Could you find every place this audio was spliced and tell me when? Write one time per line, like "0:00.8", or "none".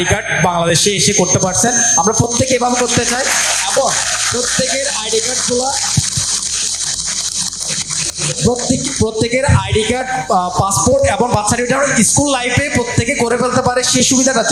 none